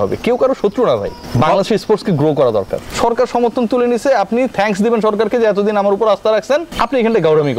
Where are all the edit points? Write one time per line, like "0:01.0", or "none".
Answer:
0:01.2
0:02.8
0:06.7